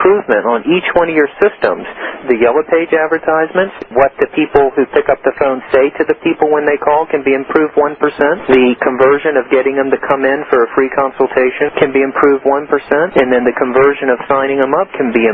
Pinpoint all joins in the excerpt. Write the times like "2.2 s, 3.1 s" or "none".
2.2 s, 3.9 s, 8.4 s, 11.7 s, 13.1 s